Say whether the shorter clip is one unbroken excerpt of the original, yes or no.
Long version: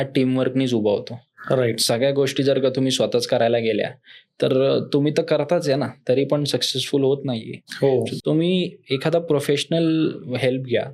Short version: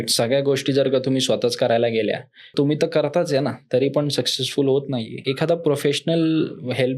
no